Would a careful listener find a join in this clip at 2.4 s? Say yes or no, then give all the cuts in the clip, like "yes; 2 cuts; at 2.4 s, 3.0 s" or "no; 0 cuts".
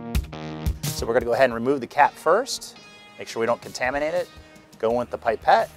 no; 1 cut; at 0.9 s